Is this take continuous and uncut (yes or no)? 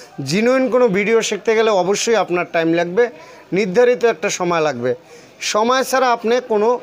yes